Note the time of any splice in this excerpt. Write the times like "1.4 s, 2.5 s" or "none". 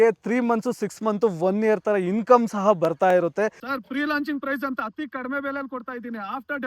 3.5 s